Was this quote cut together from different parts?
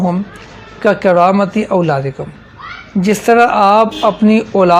no; 0 cuts

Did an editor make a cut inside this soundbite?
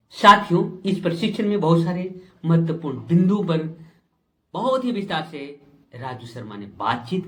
no; 0 cuts

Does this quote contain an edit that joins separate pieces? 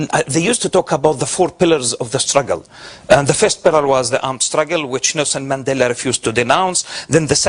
yes; 1 cut; at 6.0 s

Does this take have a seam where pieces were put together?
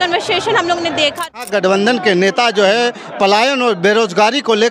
yes; 1 cut; at 1.4 s

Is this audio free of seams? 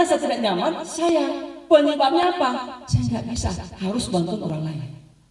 yes; 0 cuts

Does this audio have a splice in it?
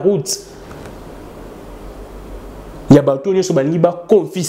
no; 0 cuts

